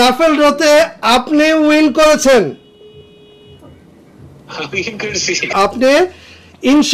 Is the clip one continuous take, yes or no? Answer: no